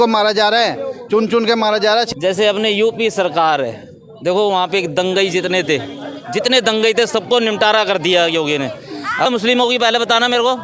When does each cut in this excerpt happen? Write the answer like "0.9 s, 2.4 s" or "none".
2.1 s, 9.3 s